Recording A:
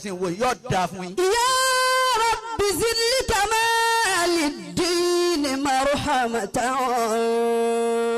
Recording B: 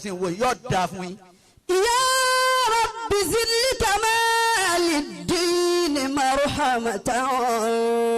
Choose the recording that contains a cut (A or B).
A